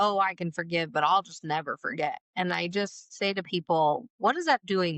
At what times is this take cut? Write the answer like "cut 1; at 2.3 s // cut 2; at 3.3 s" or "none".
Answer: none